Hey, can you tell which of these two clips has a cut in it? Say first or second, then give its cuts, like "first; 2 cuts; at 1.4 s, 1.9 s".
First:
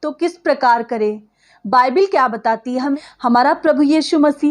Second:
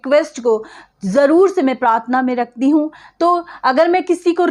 first; 1 cut; at 2.9 s